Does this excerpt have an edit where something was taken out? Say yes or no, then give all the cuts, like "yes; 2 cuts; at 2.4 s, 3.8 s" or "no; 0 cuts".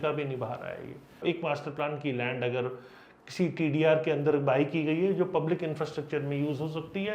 yes; 1 cut; at 1.2 s